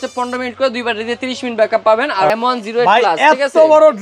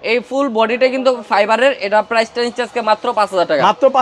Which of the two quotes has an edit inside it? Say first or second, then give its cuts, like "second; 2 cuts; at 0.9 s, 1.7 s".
first; 1 cut; at 2.3 s